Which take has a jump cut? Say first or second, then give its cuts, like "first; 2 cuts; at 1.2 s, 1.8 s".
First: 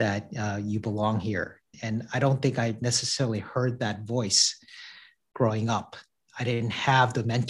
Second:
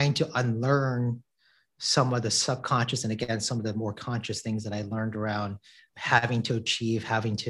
first; 1 cut; at 1.8 s